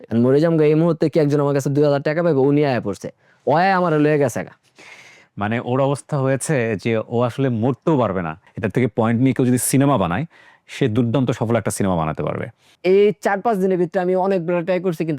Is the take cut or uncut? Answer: cut